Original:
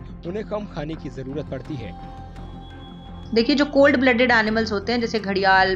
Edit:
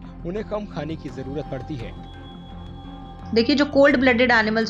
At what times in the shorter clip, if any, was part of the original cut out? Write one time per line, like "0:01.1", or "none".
none